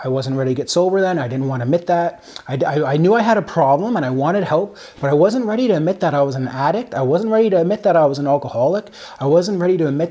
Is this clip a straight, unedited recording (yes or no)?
yes